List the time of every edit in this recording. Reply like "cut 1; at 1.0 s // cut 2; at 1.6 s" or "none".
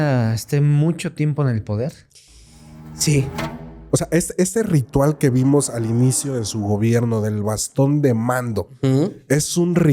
cut 1; at 3.8 s